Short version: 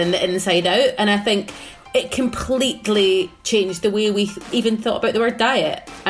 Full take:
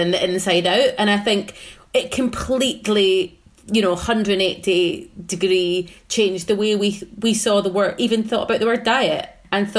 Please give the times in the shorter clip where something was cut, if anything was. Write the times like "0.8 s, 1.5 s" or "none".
3.4 s, 4.5 s